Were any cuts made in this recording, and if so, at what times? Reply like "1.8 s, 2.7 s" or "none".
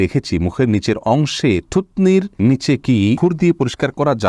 2.3 s, 3.2 s